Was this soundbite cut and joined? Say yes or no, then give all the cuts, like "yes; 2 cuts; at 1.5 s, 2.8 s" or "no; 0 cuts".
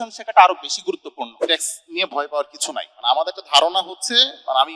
yes; 1 cut; at 1.4 s